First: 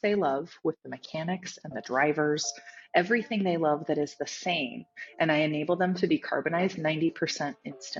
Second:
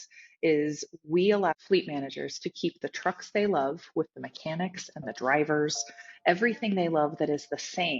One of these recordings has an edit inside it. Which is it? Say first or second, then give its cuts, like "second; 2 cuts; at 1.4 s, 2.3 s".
second; 1 cut; at 1.5 s